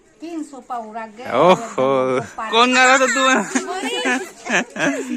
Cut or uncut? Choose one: cut